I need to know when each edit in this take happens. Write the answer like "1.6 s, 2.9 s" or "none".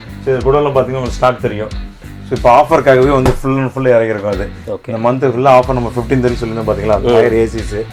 none